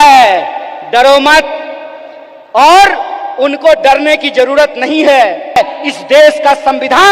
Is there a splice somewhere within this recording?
yes; 1 cut; at 5.6 s

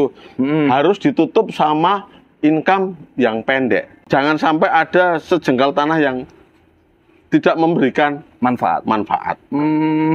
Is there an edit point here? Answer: yes; 1 cut; at 4.0 s

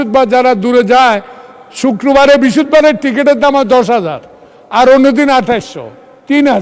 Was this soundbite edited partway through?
no; 0 cuts

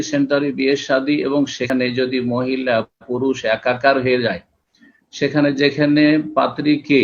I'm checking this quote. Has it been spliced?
yes; 1 cut; at 1.6 s

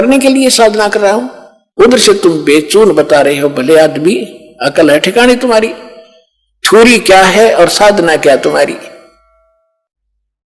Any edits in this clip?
no; 0 cuts

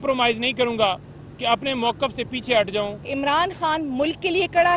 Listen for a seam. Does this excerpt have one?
yes; 1 cut; at 3.1 s

